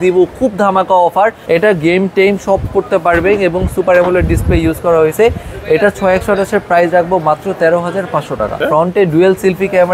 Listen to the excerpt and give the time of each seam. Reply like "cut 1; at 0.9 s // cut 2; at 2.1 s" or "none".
cut 1; at 1.4 s // cut 2; at 8.5 s